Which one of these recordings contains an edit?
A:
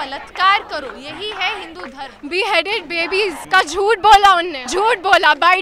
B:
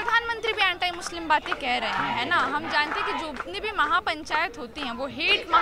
A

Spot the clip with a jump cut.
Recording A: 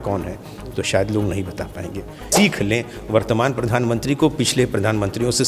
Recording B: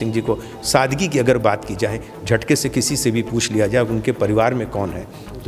A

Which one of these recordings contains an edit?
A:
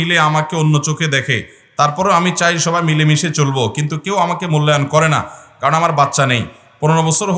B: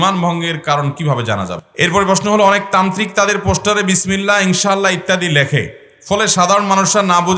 B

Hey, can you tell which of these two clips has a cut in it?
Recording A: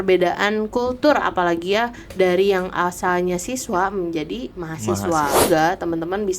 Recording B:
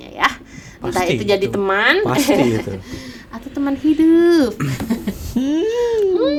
A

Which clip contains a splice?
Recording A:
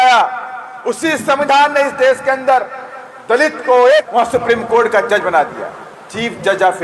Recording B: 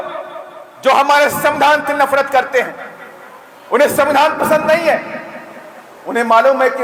A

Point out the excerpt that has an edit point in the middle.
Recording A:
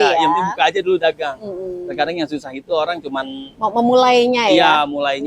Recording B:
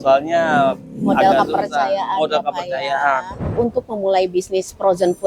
B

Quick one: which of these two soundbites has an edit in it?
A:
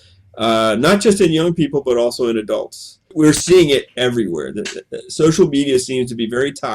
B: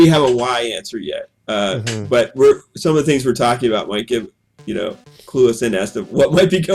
A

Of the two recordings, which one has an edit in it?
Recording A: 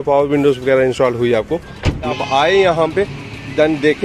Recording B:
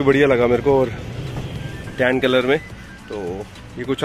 A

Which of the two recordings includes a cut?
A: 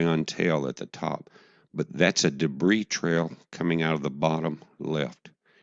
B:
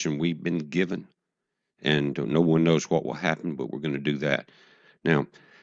B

